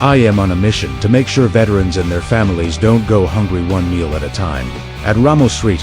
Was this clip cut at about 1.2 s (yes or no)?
no